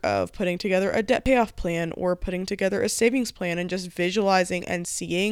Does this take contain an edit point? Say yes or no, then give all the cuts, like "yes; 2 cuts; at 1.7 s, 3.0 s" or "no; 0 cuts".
no; 0 cuts